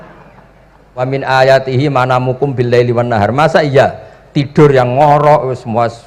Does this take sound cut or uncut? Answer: cut